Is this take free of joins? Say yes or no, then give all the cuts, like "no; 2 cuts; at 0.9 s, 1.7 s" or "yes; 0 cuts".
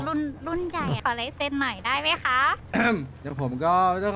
no; 2 cuts; at 1.0 s, 2.6 s